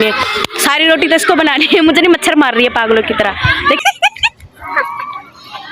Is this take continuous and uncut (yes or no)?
no